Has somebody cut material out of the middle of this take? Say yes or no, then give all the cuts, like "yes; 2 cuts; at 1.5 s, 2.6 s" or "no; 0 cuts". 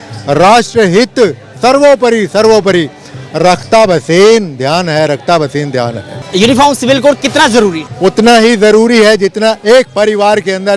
yes; 2 cuts; at 6.2 s, 7.9 s